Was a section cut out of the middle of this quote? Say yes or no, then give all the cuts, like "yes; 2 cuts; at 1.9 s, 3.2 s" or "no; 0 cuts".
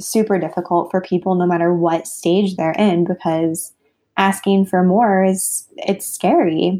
no; 0 cuts